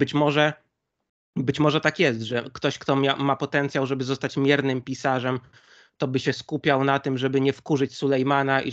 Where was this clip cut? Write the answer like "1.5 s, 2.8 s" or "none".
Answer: none

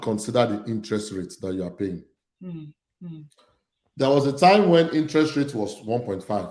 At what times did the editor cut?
none

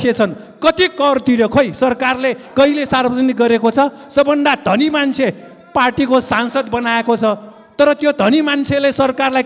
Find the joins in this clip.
none

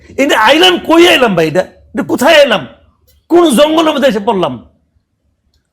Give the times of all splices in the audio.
none

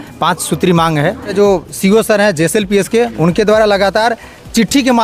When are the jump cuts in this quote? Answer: 1.3 s

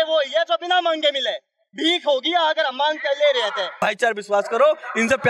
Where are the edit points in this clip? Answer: 3.7 s

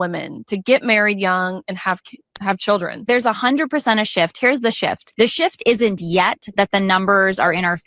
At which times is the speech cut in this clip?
5.0 s

